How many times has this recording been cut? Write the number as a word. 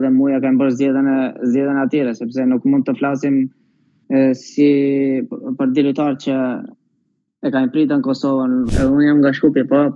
one